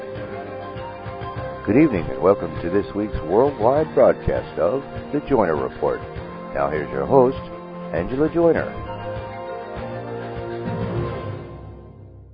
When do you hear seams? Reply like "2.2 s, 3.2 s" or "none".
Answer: none